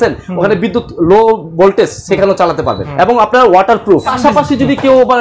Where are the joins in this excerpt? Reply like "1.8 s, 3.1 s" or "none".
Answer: 2.8 s, 4.1 s